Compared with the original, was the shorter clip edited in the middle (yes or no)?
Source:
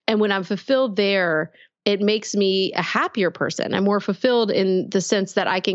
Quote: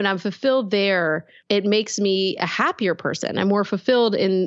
yes